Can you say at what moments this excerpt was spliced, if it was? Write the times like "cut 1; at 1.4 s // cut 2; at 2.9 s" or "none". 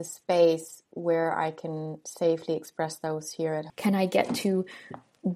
cut 1; at 3.7 s